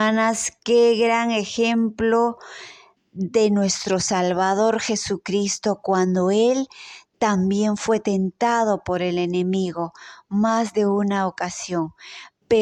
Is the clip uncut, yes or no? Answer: yes